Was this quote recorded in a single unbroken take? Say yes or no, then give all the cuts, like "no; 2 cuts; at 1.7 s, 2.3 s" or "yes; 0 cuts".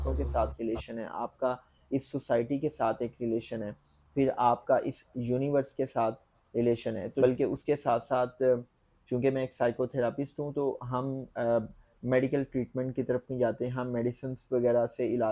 no; 1 cut; at 7.2 s